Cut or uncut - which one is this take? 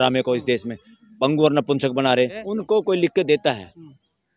cut